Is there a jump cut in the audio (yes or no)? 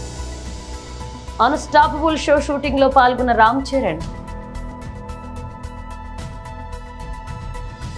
no